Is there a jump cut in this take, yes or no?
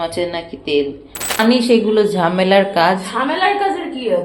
yes